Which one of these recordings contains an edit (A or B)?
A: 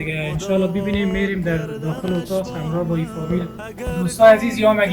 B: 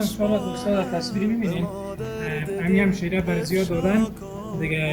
A